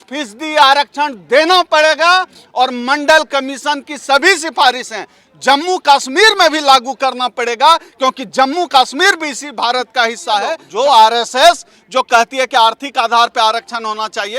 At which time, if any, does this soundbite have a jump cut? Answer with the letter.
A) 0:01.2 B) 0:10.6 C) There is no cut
B